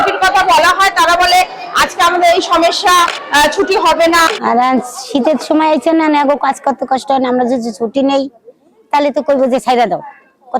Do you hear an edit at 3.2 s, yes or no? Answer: yes